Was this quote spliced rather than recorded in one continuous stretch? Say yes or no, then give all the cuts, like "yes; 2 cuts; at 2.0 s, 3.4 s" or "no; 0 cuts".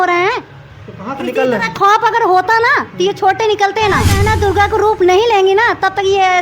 yes; 1 cut; at 4.2 s